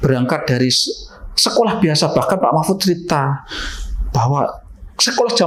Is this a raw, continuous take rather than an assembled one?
yes; 0 cuts

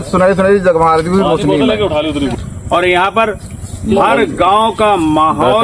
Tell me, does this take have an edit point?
yes; 1 cut; at 2.4 s

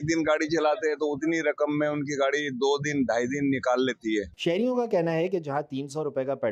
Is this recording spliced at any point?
no; 0 cuts

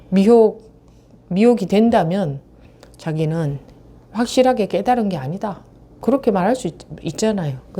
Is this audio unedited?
no; 1 cut; at 6.0 s

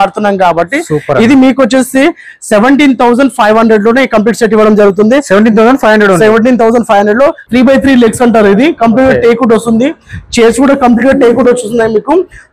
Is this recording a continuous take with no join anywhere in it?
no; 1 cut; at 7.4 s

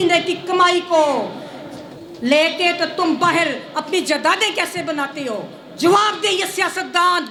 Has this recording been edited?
no; 0 cuts

